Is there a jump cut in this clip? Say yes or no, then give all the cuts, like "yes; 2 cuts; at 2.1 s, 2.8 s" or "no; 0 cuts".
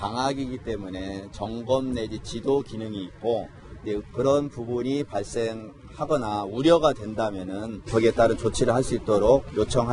yes; 1 cut; at 8.7 s